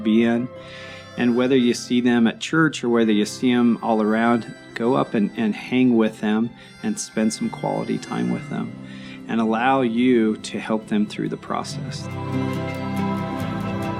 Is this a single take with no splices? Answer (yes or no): no